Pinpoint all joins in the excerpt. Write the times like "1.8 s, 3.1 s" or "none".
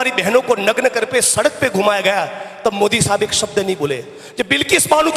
none